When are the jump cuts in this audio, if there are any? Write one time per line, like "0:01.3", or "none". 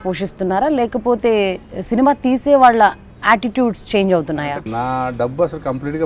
0:04.7